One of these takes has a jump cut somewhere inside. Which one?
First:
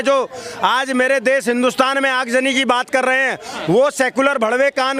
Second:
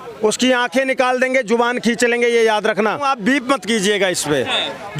second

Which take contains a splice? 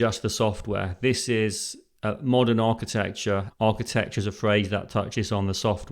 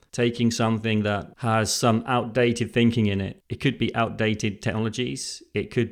first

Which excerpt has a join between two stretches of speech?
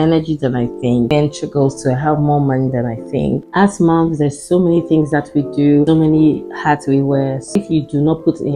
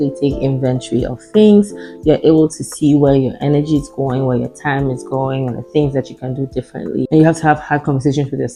first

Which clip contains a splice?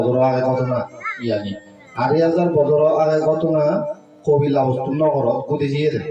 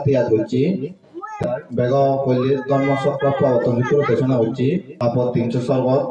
second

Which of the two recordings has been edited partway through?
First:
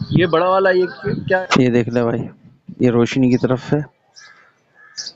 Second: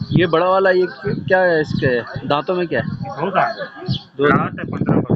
first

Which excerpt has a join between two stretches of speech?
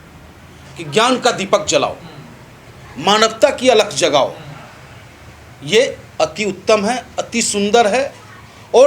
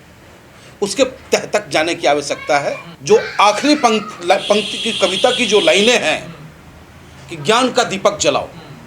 second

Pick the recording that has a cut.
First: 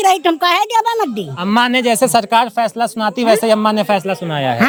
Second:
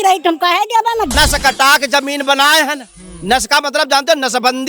second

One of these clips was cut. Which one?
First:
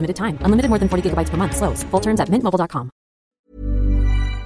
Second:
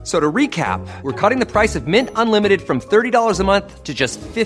first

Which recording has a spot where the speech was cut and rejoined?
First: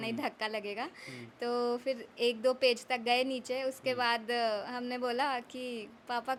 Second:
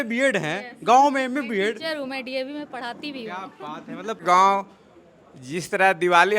second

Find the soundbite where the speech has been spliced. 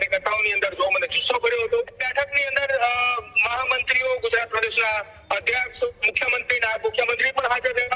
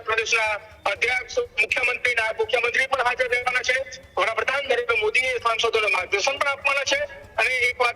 first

